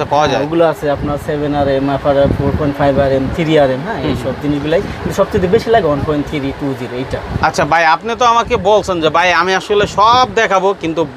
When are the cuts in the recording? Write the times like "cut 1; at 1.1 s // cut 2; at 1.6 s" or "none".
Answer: none